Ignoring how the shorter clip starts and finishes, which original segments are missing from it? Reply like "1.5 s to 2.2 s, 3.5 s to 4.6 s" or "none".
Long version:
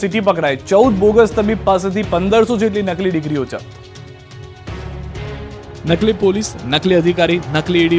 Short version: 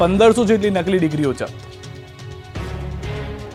none